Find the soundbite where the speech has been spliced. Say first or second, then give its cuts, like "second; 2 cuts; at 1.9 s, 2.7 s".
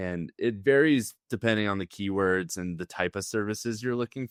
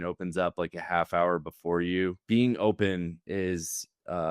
second; 1 cut; at 2.2 s